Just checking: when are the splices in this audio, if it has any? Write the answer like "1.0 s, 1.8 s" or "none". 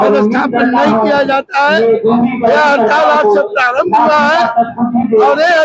none